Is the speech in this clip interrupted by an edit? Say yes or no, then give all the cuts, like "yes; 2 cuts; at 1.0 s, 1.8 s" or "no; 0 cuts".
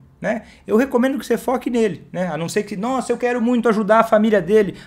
no; 0 cuts